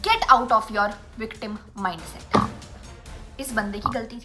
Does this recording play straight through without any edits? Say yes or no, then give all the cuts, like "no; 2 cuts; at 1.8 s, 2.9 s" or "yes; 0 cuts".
yes; 0 cuts